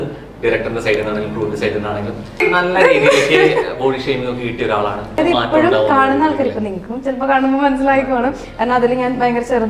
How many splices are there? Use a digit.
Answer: 2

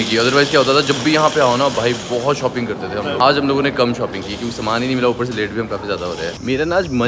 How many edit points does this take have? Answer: 0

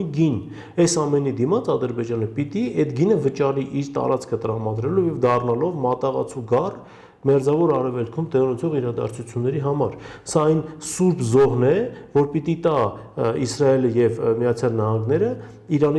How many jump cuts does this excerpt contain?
0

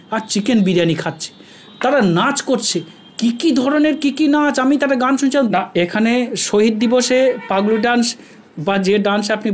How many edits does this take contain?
1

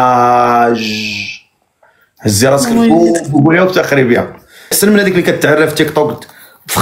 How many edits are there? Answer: 1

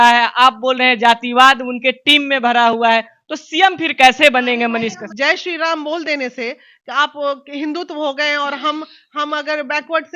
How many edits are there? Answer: 1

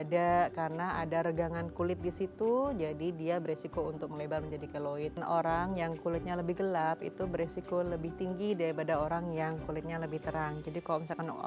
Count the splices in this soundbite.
1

